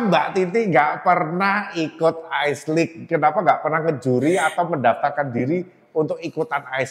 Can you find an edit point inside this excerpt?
no; 0 cuts

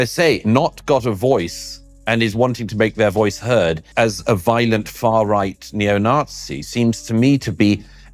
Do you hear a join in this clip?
yes; 1 cut; at 3.9 s

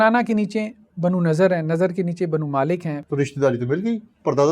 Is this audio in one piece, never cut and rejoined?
no; 1 cut; at 3.0 s

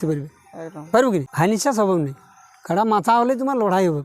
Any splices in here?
yes; 1 cut; at 1.3 s

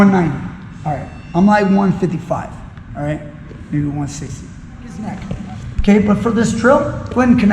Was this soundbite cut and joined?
yes; 1 cut; at 5.2 s

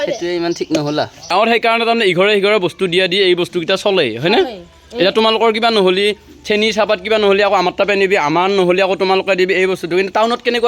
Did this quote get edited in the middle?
yes; 1 cut; at 1.3 s

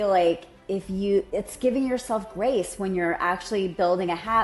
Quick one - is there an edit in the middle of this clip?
yes; 1 cut; at 1.0 s

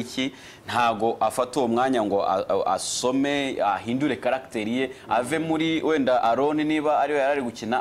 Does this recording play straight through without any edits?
yes; 0 cuts

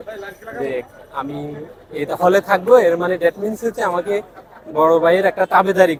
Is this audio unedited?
yes; 0 cuts

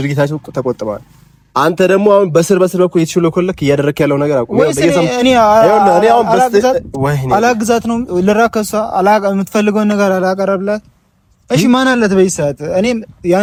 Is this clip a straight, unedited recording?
yes; 0 cuts

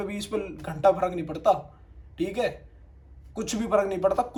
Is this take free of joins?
yes; 0 cuts

